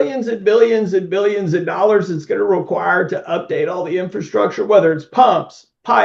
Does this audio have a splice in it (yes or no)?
no